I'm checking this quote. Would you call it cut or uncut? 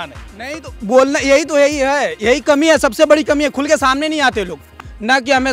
cut